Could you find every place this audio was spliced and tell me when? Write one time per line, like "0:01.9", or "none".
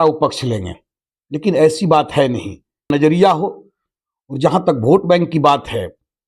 0:02.9